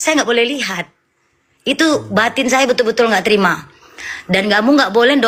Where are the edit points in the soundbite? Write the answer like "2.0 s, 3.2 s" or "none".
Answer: none